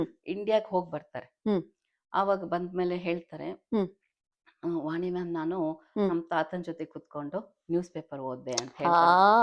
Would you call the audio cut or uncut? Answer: uncut